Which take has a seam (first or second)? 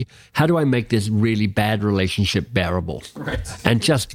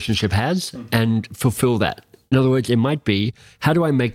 second